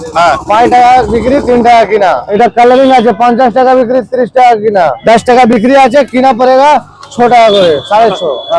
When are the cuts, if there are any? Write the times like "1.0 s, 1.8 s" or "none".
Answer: 2.3 s, 5.0 s